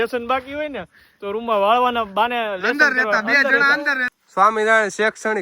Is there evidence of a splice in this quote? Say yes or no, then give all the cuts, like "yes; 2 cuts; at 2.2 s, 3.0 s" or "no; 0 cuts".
yes; 1 cut; at 4.0 s